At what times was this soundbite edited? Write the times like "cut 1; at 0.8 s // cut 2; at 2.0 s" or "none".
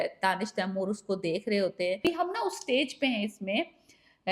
cut 1; at 2.1 s